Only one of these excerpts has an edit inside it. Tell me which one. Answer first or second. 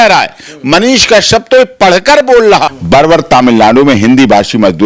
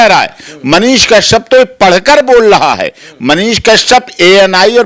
first